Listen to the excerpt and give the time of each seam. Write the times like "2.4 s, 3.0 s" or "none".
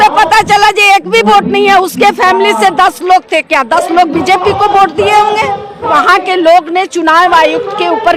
5.8 s